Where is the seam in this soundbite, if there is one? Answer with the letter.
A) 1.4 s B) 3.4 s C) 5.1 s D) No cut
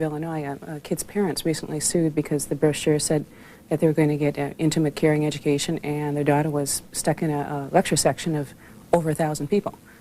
A